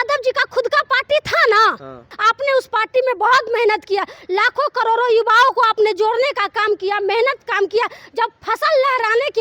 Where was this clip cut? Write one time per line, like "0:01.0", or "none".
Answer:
0:02.1